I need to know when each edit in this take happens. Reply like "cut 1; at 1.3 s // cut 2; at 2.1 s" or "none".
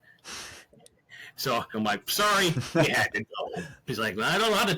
cut 1; at 1.7 s // cut 2; at 3.8 s